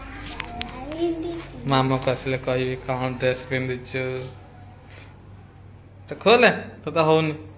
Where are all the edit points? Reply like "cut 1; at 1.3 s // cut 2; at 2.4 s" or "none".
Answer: none

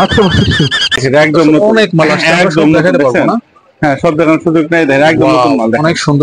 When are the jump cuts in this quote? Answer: cut 1; at 1.0 s

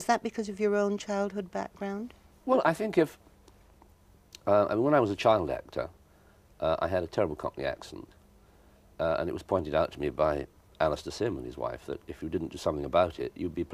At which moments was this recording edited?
none

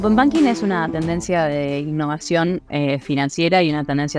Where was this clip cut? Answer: none

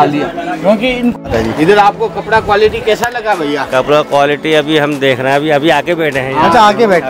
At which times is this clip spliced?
cut 1; at 1.2 s

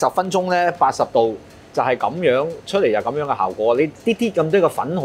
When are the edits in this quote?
none

